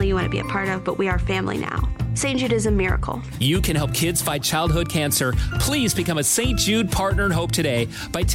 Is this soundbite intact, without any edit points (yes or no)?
yes